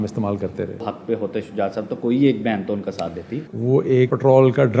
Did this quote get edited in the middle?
yes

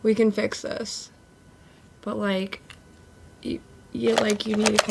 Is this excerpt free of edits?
yes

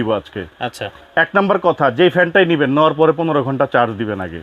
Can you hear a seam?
no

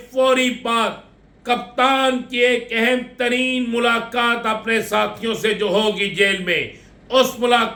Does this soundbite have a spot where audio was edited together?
no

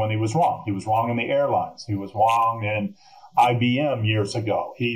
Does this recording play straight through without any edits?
yes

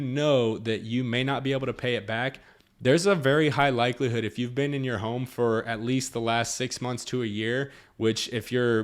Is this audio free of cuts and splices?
yes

